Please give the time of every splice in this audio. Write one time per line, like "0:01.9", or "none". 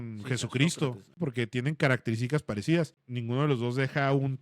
0:01.2
0:03.1